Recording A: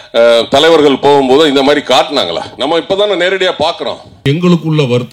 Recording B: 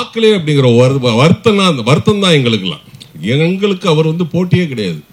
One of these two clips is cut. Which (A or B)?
A